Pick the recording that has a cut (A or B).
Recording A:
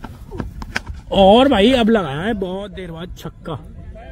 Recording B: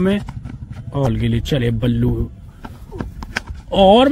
B